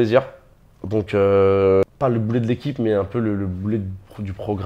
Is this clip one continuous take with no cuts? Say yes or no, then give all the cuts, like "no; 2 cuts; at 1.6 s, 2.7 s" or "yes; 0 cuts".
no; 1 cut; at 1.8 s